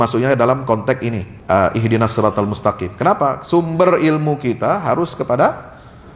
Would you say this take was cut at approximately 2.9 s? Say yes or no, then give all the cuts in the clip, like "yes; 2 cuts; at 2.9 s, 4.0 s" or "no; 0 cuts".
no; 1 cut; at 1.3 s